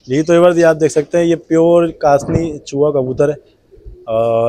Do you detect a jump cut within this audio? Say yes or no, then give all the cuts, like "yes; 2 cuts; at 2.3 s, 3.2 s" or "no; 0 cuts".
no; 0 cuts